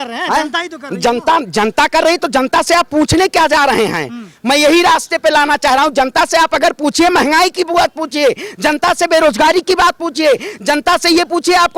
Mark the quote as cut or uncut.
uncut